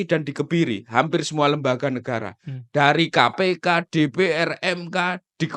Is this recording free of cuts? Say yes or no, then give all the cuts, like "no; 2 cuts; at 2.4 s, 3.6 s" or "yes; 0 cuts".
yes; 0 cuts